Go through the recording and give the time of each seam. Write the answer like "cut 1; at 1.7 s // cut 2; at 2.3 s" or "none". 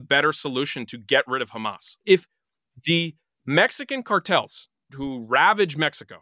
cut 1; at 1.8 s // cut 2; at 4.9 s